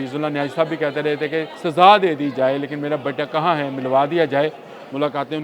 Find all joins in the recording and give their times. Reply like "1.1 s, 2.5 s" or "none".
1.5 s

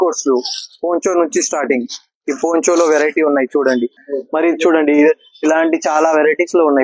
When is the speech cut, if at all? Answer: 4.0 s

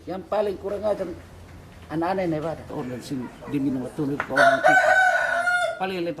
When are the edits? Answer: 2.7 s

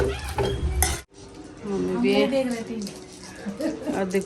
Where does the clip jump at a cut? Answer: 1.0 s

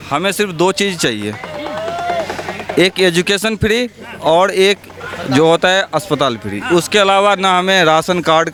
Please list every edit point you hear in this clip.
none

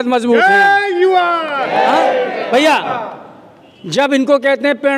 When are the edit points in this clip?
none

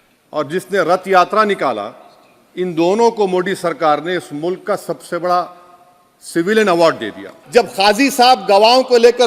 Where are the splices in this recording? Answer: 7.3 s

